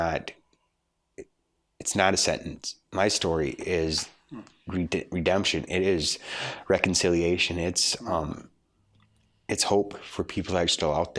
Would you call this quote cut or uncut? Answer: uncut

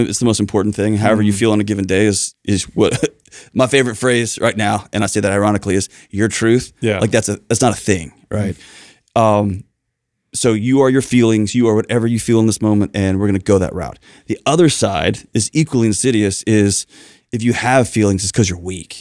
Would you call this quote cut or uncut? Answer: uncut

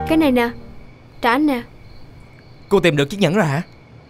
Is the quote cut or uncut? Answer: uncut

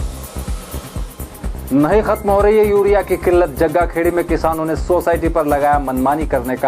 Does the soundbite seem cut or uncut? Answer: cut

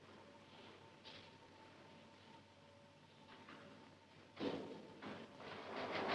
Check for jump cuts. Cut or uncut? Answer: uncut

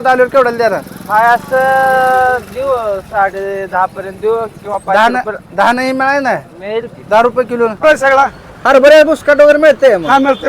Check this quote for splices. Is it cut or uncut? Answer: cut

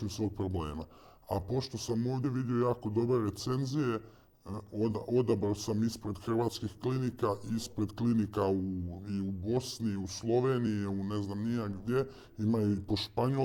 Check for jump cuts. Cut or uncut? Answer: uncut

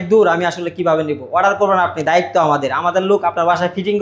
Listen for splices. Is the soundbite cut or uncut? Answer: uncut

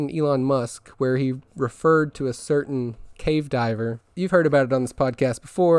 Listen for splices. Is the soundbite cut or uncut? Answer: cut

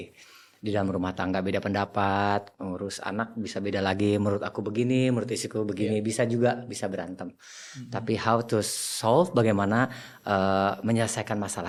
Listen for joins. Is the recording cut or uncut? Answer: uncut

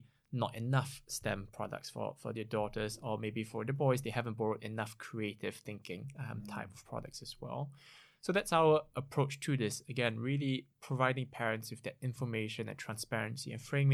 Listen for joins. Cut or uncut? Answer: uncut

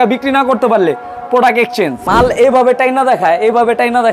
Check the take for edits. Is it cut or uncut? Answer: cut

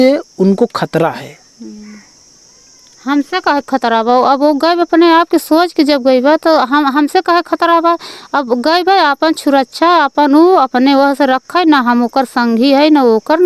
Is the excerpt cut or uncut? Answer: uncut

